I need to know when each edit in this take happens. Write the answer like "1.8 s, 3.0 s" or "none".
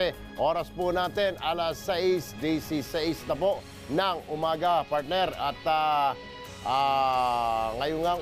2.9 s